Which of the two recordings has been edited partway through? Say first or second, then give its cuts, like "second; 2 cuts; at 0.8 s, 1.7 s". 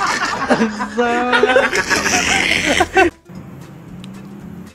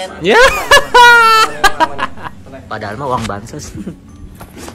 first; 1 cut; at 3.1 s